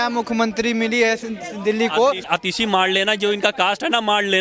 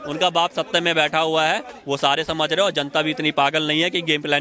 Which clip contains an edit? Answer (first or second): first